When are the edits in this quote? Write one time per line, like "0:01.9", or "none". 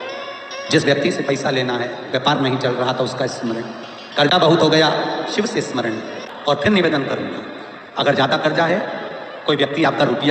0:06.2